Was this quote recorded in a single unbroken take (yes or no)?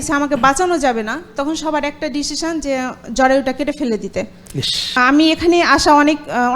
no